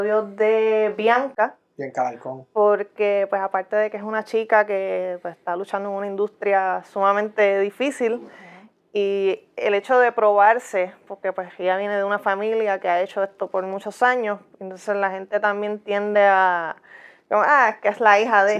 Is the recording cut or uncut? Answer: uncut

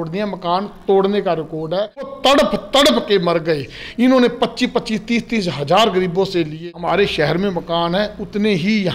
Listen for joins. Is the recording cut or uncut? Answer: cut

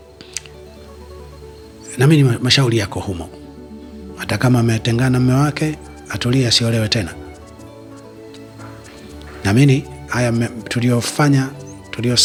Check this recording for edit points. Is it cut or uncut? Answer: uncut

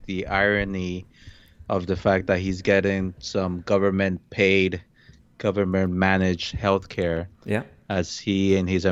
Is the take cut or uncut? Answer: uncut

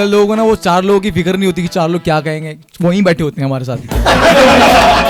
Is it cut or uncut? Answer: uncut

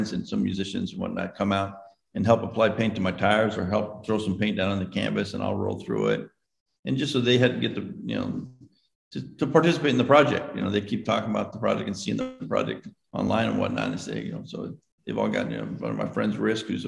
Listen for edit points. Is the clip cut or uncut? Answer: uncut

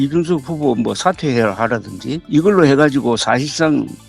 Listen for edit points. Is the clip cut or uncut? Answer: cut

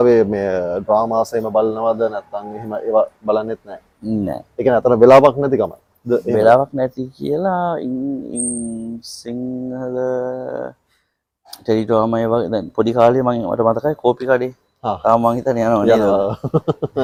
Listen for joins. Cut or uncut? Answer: uncut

